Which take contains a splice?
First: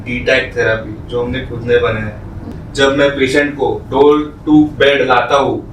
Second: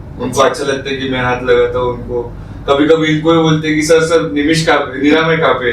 first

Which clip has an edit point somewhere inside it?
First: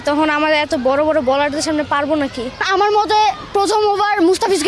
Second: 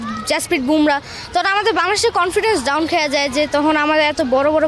first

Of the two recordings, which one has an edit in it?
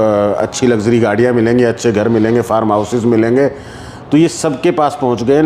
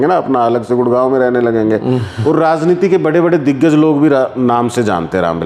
second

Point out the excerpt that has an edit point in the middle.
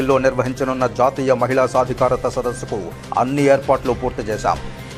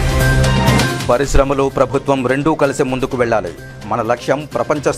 second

